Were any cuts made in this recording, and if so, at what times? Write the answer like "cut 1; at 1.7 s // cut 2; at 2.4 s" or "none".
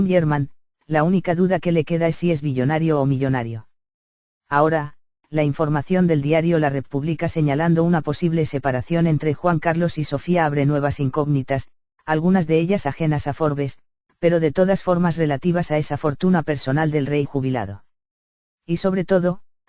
cut 1; at 8.2 s